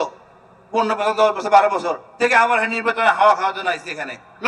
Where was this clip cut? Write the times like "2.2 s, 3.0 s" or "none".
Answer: none